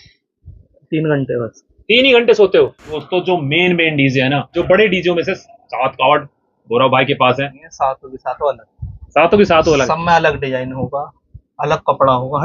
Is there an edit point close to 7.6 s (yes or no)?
yes